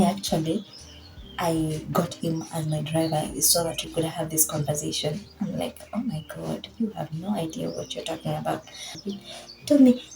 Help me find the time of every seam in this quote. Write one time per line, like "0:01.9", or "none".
0:09.0